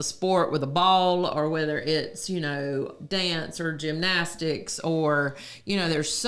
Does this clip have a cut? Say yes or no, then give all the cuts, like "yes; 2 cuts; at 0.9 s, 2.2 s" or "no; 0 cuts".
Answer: no; 0 cuts